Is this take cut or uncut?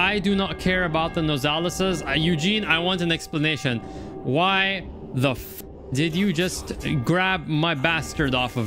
uncut